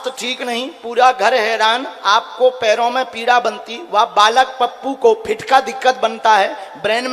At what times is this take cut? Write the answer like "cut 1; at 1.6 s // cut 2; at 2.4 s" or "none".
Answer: none